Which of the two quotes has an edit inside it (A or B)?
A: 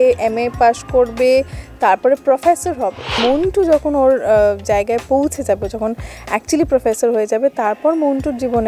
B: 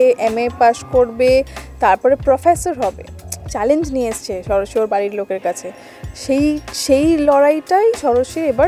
A